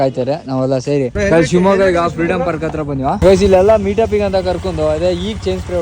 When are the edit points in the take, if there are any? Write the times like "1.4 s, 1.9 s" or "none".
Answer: 1.2 s, 3.2 s